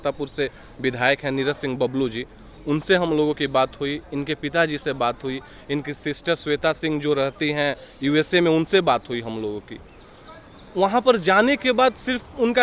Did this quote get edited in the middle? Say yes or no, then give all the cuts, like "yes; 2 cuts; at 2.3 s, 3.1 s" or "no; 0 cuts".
no; 0 cuts